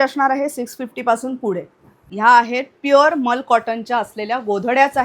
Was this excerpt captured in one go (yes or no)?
no